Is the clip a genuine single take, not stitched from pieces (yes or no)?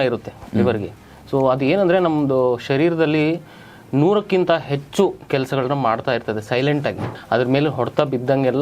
no